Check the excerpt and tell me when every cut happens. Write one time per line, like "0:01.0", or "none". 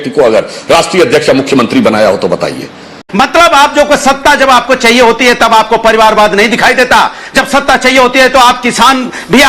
0:03.0